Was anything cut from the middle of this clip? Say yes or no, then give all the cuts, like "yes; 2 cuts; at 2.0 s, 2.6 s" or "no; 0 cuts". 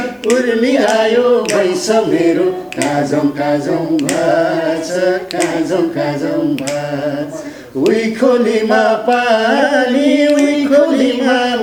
no; 0 cuts